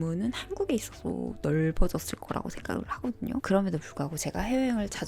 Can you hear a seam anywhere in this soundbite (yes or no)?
yes